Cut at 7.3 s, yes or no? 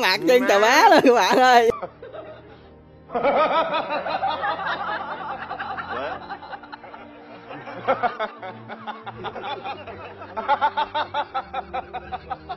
no